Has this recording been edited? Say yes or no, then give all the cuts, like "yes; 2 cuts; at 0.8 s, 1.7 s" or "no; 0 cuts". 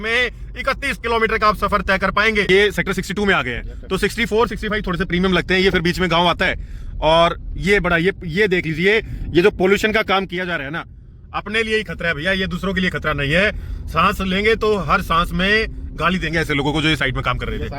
yes; 1 cut; at 2.5 s